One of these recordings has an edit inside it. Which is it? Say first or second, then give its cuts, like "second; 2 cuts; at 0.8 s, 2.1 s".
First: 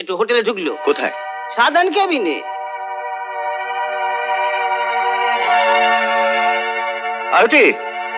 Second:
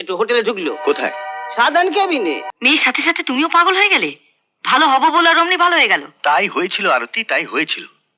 second; 1 cut; at 2.5 s